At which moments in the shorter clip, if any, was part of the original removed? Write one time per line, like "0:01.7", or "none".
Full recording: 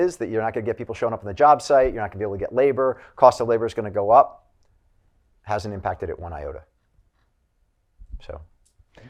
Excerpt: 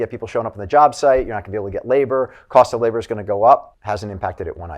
0:03.7